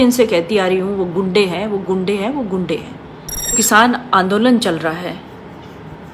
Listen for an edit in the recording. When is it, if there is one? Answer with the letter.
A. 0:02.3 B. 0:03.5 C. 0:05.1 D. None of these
B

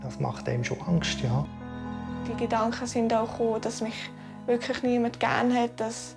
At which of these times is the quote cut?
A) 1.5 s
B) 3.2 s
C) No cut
A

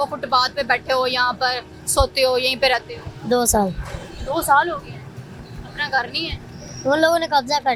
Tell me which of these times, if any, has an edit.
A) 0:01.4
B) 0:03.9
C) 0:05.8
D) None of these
D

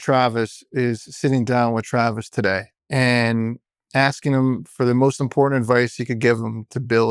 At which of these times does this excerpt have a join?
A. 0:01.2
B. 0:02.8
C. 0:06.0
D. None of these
B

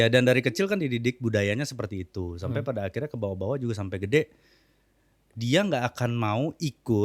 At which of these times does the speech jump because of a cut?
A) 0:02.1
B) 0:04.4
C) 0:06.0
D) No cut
D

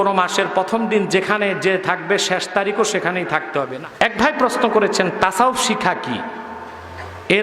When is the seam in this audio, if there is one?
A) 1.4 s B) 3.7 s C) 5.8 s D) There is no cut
B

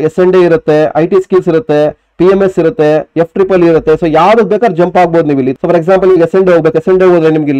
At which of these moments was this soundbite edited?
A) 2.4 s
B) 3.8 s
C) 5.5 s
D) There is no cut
C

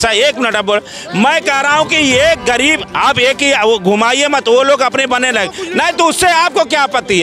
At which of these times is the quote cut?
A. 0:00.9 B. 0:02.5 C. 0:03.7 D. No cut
D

